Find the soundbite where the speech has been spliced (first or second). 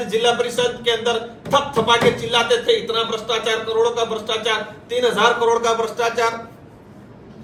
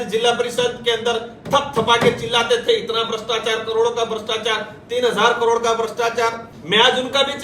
second